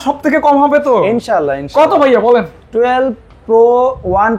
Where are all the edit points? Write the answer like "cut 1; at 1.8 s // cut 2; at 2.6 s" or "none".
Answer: none